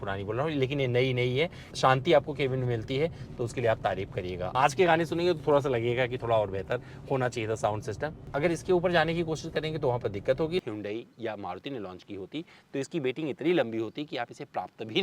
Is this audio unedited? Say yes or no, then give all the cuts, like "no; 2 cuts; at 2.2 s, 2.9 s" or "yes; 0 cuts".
no; 4 cuts; at 1.7 s, 4.5 s, 8.2 s, 10.6 s